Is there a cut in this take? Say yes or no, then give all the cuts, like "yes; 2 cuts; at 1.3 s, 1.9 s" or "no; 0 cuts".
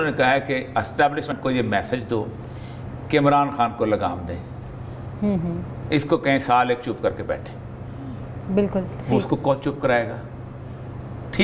yes; 1 cut; at 1.3 s